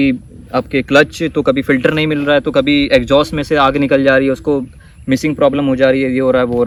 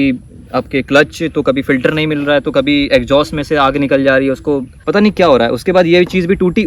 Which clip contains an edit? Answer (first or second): second